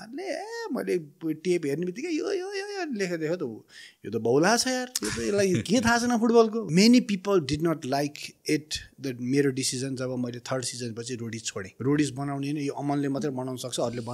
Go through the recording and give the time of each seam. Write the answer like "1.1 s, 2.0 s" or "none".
6.7 s, 11.7 s